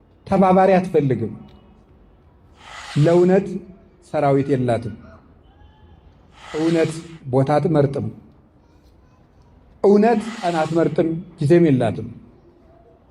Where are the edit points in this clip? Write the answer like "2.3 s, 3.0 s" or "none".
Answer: 2.9 s, 6.6 s, 10.4 s